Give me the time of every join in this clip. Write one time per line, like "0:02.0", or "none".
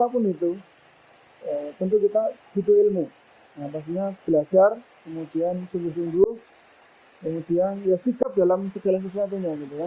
none